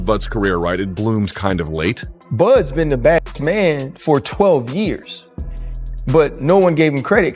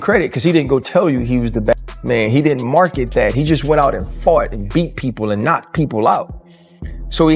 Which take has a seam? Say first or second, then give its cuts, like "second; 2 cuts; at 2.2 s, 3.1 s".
first; 1 cut; at 2.0 s